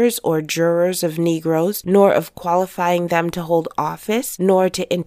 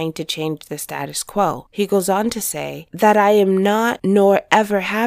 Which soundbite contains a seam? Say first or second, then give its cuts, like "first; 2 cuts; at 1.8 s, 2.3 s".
second; 1 cut; at 1.6 s